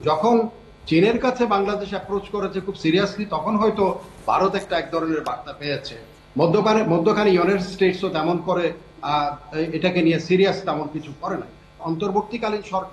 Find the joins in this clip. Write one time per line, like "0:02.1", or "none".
0:11.8